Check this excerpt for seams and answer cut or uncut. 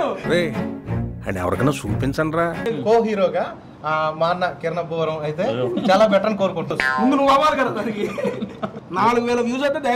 cut